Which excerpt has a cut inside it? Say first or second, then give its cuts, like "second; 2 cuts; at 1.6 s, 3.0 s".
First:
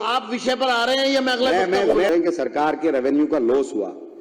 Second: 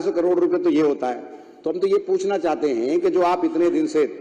first; 1 cut; at 2.1 s